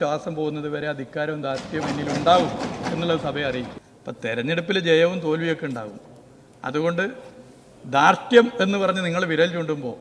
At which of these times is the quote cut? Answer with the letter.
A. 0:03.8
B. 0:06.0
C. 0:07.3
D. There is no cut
A